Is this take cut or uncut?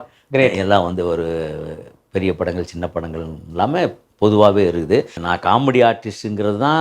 cut